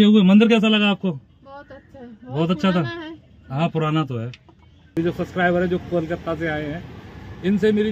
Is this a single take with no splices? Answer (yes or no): no